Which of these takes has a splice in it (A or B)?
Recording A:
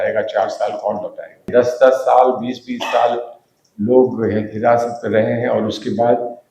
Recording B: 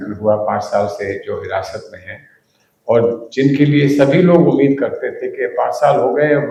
A